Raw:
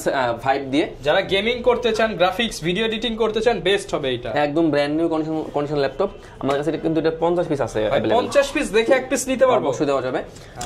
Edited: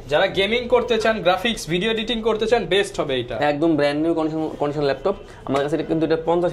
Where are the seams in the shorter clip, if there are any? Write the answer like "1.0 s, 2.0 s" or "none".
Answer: none